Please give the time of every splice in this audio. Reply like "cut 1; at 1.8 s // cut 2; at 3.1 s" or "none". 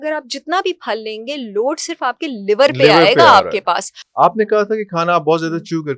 cut 1; at 3.9 s

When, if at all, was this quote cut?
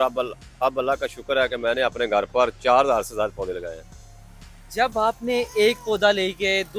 none

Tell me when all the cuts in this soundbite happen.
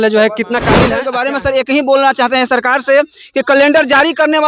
cut 1; at 1.0 s

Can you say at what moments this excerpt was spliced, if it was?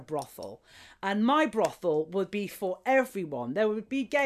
none

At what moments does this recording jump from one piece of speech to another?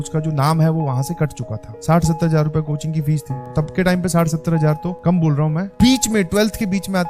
cut 1; at 1.7 s // cut 2; at 3.5 s // cut 3; at 5.7 s

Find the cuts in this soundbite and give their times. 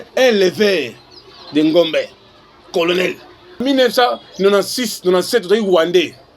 cut 1; at 3.6 s

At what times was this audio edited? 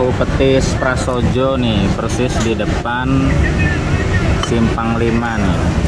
none

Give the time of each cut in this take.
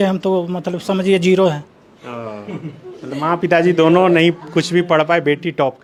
none

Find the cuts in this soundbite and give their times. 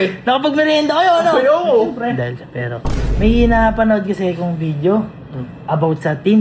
none

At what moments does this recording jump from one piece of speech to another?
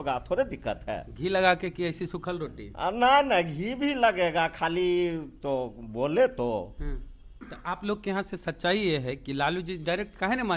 none

